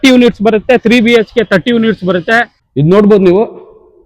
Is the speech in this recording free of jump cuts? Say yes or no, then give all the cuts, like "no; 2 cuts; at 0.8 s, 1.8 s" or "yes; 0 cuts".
no; 1 cut; at 2.6 s